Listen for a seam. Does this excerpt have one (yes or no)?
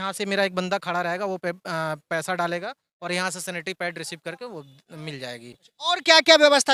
no